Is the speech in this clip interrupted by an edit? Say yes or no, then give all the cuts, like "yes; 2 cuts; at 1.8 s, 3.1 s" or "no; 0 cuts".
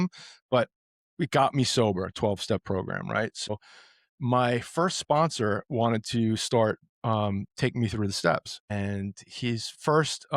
yes; 2 cuts; at 3.5 s, 8.7 s